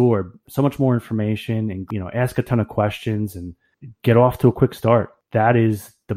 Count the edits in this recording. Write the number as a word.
two